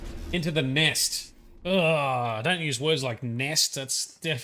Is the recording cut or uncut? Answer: uncut